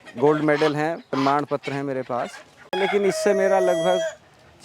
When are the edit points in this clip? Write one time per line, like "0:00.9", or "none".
0:02.5